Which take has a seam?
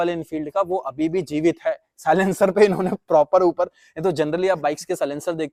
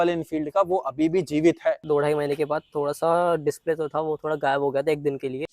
second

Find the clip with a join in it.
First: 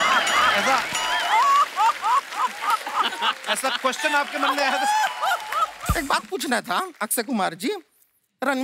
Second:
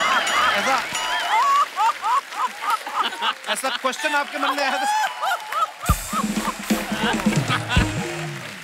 first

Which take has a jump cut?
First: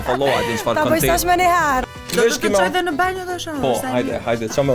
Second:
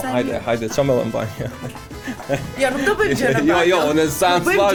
first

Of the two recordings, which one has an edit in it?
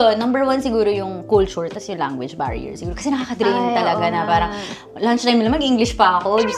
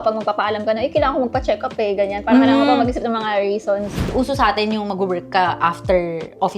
second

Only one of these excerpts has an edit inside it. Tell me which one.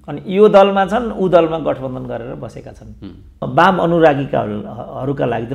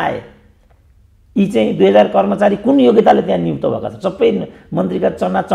first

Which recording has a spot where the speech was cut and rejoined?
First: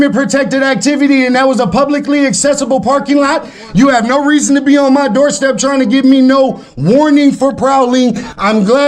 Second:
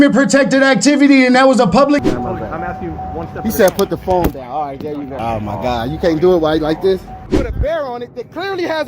second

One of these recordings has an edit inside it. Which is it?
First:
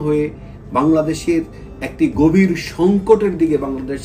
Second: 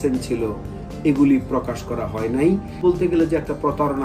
second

